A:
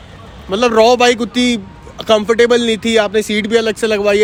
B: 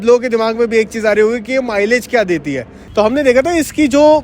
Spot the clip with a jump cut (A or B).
B